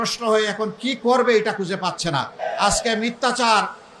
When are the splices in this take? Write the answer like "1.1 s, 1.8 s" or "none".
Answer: 2.4 s